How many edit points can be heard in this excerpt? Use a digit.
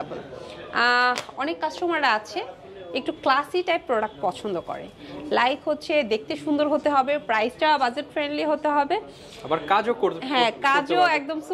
0